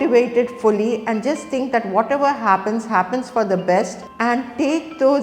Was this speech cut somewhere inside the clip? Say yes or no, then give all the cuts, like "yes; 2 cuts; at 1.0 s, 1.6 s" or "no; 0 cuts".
yes; 1 cut; at 4.0 s